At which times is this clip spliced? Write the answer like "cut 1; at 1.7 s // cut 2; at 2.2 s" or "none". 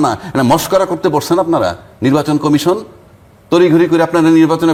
none